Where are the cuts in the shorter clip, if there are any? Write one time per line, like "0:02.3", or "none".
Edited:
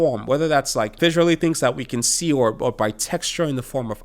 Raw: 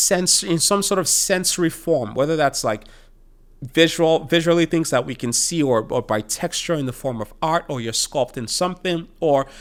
0:01.0